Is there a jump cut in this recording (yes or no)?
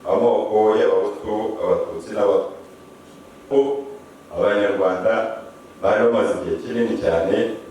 yes